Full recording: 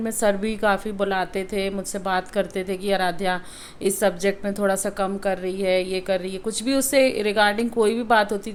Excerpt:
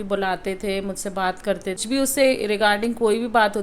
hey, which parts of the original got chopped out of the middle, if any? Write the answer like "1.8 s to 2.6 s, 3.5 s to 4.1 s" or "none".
2.7 s to 6.6 s